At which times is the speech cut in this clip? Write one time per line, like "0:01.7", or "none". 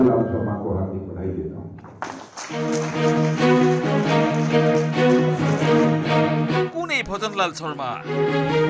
none